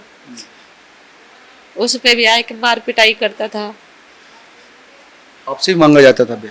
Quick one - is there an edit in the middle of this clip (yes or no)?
yes